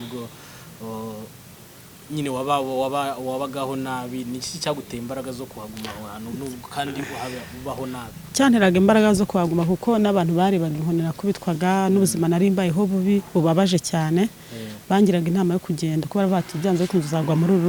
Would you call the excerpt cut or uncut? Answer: uncut